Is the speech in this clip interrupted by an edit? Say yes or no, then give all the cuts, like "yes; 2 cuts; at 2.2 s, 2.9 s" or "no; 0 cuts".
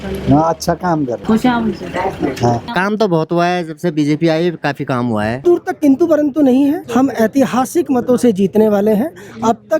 yes; 4 cuts; at 1.2 s, 2.7 s, 5.4 s, 6.8 s